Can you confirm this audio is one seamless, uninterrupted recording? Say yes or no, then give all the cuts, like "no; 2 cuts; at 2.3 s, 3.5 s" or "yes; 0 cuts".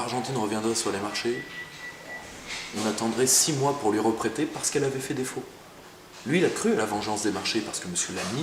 yes; 0 cuts